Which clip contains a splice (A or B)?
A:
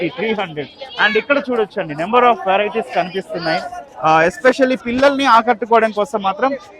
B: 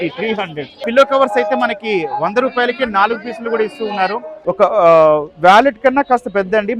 B